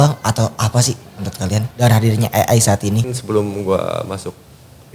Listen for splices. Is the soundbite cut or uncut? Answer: cut